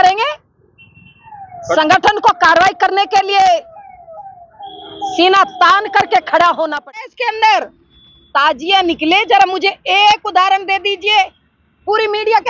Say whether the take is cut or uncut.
cut